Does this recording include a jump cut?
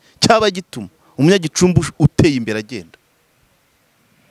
no; 0 cuts

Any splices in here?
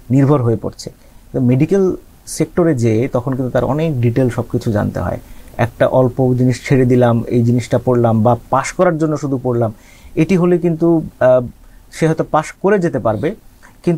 no; 0 cuts

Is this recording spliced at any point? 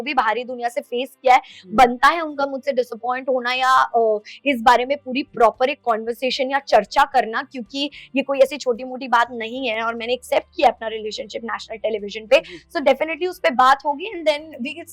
no; 0 cuts

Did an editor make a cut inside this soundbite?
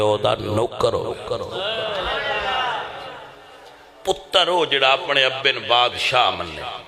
no; 0 cuts

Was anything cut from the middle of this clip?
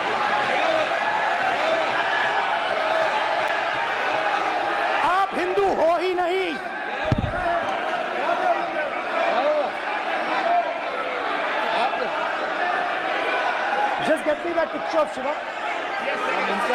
no; 0 cuts

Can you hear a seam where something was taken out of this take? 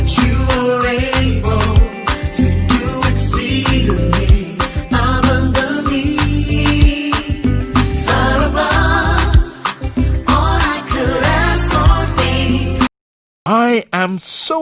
yes; 1 cut; at 13.5 s

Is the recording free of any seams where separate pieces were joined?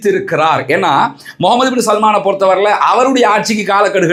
yes; 0 cuts

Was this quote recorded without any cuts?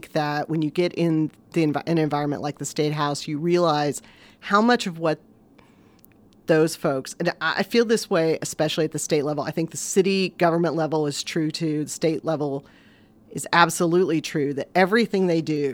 yes; 0 cuts

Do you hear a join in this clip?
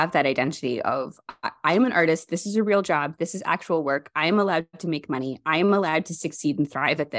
no; 0 cuts

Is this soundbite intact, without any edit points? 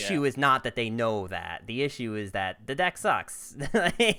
yes; 0 cuts

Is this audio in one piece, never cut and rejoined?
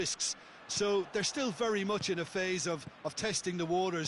yes; 0 cuts

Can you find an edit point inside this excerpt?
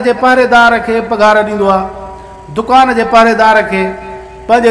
no; 0 cuts

